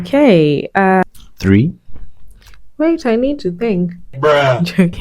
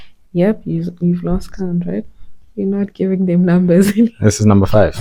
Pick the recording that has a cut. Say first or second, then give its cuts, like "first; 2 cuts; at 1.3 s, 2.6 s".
first; 1 cut; at 1.0 s